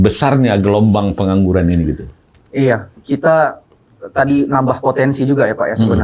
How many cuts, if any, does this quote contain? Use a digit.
0